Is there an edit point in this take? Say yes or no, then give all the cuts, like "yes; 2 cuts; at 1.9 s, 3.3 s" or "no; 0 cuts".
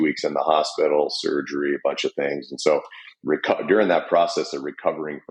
no; 0 cuts